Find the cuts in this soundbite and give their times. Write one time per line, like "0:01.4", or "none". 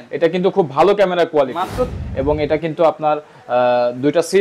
0:02.0